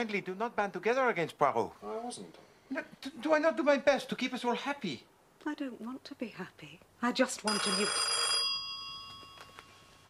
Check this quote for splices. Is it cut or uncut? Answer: cut